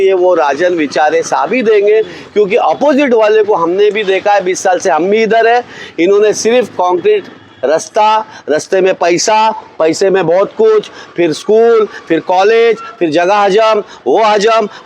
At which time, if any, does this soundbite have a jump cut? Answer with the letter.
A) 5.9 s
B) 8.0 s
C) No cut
C